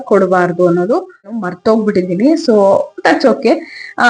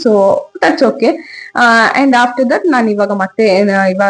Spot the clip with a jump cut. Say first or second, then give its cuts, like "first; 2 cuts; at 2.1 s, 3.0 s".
first; 1 cut; at 1.5 s